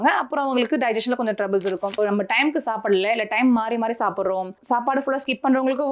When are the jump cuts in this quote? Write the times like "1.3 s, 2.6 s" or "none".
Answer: 2.0 s